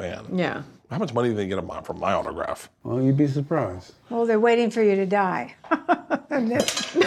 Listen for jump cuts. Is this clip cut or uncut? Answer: cut